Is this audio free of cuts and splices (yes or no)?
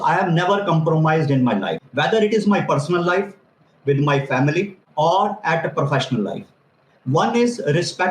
no